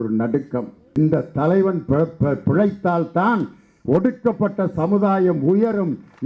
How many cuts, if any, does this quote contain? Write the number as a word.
one